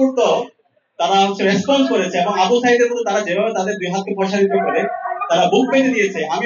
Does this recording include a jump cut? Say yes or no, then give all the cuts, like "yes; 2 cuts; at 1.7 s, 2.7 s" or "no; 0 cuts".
no; 0 cuts